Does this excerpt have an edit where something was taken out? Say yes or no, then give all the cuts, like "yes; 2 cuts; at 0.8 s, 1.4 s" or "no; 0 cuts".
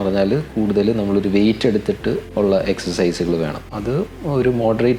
yes; 2 cuts; at 2.3 s, 3.7 s